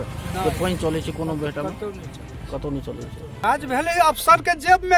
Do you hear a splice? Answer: yes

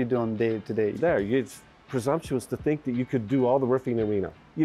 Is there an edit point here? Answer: yes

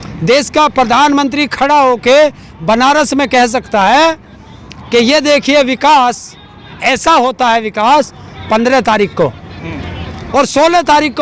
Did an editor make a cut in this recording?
no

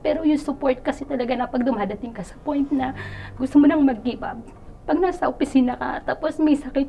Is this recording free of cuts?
yes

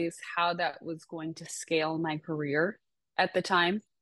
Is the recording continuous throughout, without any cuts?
yes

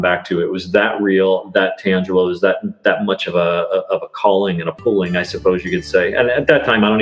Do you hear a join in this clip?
no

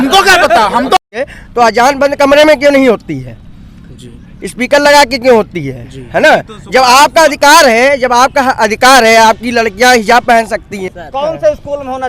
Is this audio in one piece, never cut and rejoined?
no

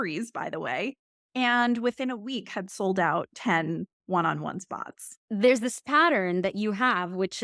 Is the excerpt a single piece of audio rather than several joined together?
no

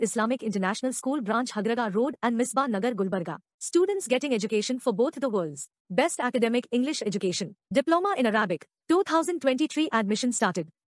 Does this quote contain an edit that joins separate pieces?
no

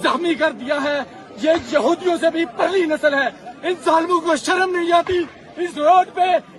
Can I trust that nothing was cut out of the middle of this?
yes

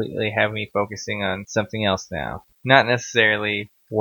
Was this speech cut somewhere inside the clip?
yes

